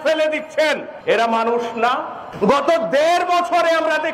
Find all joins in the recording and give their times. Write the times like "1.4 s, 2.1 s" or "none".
0.9 s, 2.2 s